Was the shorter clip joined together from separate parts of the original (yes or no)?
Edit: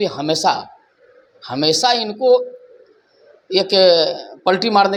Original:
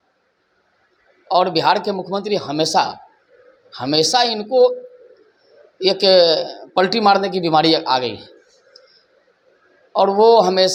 no